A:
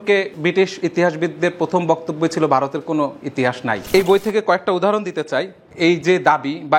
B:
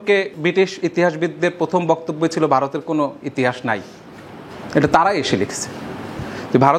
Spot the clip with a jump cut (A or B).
A